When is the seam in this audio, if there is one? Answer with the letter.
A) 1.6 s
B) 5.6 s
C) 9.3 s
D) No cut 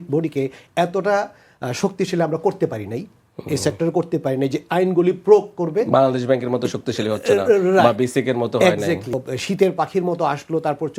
C